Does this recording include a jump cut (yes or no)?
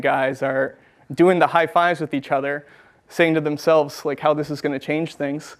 no